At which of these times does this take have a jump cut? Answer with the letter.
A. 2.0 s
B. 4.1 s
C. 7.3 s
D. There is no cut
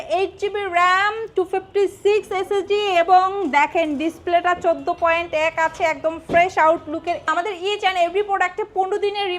C